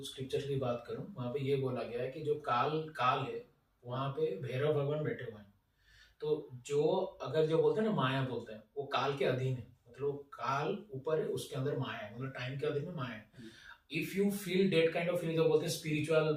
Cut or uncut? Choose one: uncut